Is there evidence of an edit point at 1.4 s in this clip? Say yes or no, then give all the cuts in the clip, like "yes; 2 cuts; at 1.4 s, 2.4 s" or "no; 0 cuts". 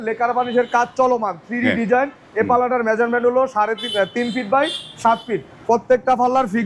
no; 0 cuts